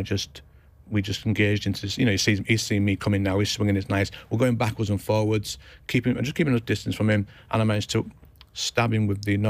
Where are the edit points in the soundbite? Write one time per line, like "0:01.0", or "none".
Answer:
none